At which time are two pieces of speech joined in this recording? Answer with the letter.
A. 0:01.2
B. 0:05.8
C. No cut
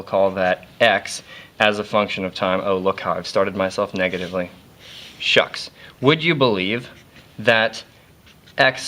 C